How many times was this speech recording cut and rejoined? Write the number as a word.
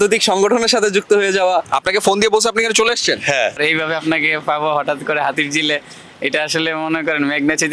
two